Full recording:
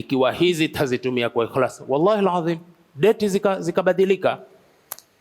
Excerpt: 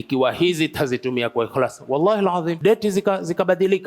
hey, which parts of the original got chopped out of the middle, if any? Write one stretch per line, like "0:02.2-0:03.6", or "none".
0:02.5-0:02.9